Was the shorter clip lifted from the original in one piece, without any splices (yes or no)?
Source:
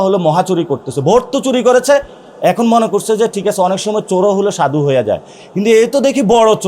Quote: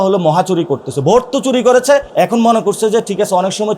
no